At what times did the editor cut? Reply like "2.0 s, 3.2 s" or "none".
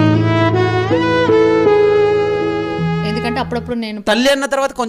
none